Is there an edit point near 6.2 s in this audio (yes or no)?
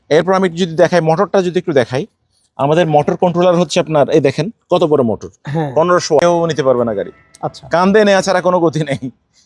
yes